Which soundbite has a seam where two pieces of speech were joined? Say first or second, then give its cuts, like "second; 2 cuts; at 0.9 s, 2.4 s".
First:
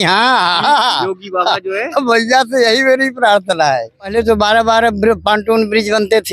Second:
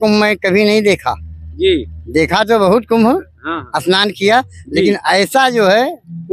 first; 1 cut; at 4.1 s